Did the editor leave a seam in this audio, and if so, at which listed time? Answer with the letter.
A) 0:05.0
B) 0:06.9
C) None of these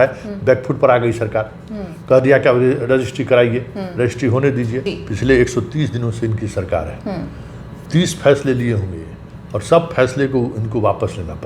A